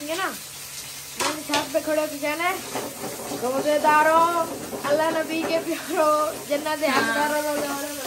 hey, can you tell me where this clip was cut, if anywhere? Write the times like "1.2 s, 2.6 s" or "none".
none